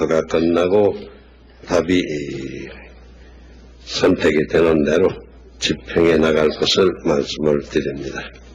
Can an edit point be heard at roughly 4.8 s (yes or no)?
yes